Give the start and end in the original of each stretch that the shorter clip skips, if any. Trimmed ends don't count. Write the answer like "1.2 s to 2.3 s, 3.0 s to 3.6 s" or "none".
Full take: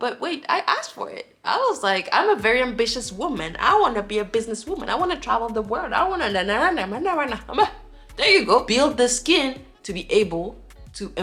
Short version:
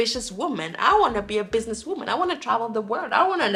none